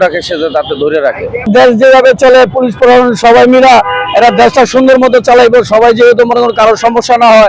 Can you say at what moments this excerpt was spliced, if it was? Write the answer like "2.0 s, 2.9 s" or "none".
none